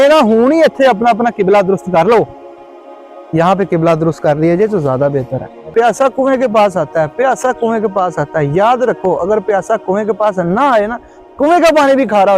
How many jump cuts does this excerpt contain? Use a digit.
1